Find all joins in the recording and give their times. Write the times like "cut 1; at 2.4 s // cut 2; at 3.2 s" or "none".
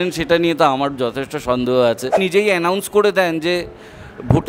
cut 1; at 2.2 s